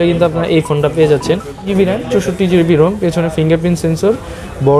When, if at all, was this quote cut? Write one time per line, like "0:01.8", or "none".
0:01.7